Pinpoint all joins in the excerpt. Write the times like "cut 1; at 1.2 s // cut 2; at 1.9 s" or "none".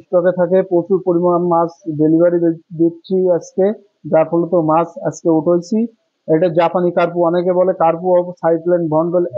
none